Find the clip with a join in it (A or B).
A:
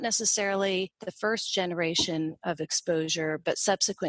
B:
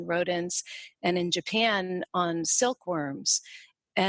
A